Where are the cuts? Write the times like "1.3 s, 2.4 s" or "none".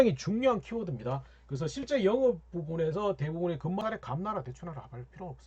3.8 s